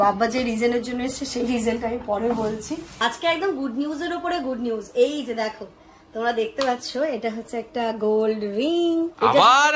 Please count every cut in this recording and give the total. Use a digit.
1